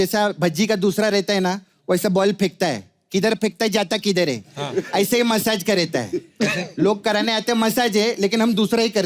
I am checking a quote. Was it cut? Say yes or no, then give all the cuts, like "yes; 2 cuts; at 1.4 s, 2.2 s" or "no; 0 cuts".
no; 0 cuts